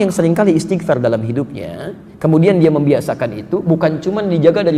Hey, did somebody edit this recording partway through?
no; 0 cuts

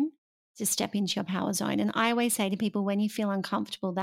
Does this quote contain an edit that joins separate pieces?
no; 0 cuts

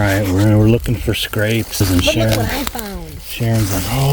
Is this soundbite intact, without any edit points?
no; 1 cut; at 1.8 s

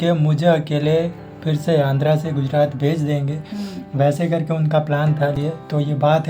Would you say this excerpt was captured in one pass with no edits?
no; 1 cut; at 5.3 s

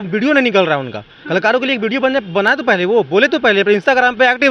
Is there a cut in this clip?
no; 0 cuts

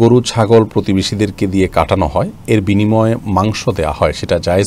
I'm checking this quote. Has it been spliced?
no; 0 cuts

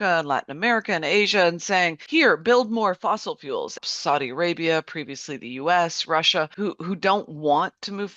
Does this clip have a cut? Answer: yes; 3 cuts; at 2.0 s, 3.8 s, 6.5 s

